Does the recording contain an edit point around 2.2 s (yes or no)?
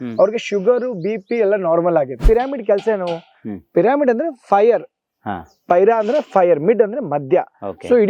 yes